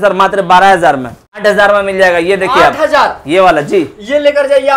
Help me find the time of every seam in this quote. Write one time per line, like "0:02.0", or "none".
0:01.4